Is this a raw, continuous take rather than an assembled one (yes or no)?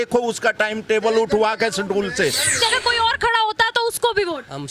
no